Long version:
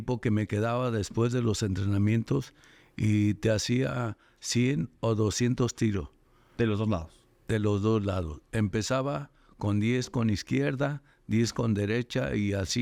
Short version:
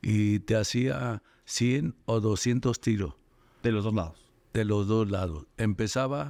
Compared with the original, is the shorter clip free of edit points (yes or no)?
yes